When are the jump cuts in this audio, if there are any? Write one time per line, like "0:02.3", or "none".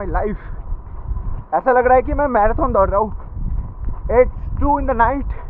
none